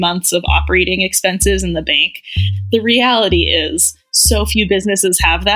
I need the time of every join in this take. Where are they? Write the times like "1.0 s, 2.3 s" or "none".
2.5 s